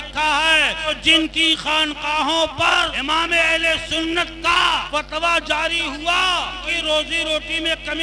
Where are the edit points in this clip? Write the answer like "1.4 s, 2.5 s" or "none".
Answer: 1.0 s, 2.9 s, 4.9 s, 6.7 s